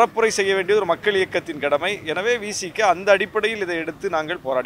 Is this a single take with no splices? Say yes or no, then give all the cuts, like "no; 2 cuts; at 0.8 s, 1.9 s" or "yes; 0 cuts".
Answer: yes; 0 cuts